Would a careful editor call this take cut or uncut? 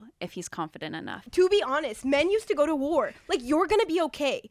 cut